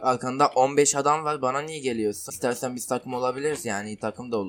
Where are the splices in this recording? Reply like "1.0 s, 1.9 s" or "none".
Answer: 2.3 s